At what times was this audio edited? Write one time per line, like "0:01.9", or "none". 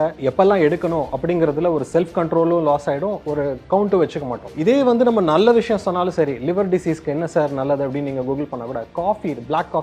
0:04.4